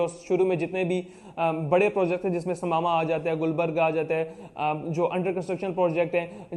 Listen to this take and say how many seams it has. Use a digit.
0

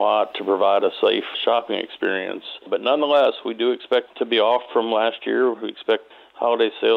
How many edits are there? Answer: 4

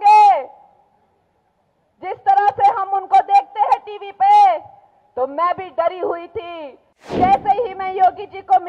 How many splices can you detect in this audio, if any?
1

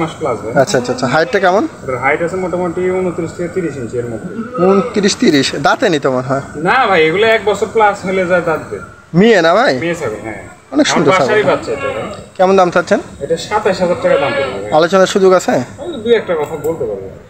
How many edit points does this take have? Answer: 0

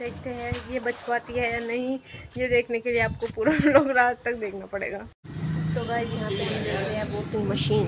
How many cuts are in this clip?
0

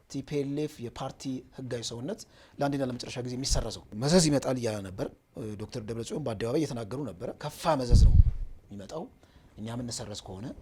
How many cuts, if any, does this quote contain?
2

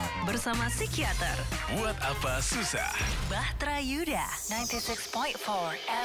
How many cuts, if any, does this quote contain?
0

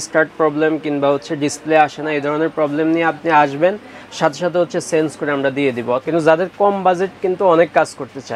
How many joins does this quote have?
1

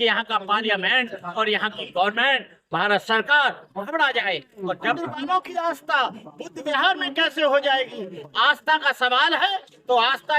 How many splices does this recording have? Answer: 1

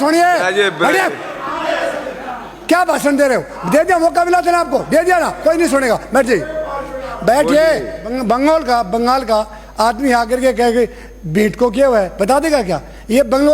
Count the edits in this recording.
1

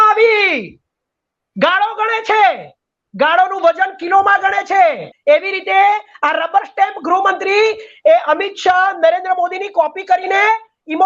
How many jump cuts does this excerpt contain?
1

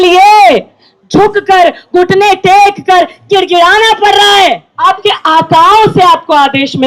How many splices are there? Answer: 1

